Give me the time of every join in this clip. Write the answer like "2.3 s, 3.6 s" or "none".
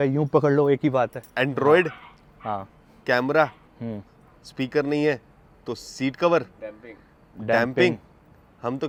none

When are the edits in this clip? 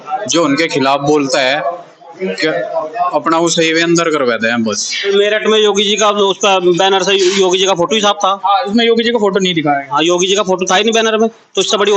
5.1 s

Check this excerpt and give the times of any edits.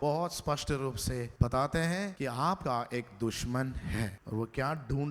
1.3 s, 2.5 s, 4.2 s

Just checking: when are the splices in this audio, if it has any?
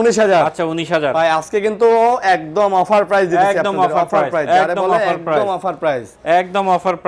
none

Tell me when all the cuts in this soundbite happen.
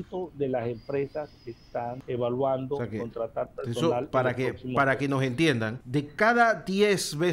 2.0 s, 5.8 s

